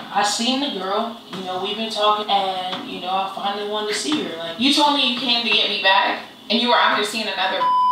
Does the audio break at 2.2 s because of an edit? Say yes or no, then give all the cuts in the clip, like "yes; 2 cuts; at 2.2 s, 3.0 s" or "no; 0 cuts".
yes; 3 cuts; at 1.3 s, 2.2 s, 4.4 s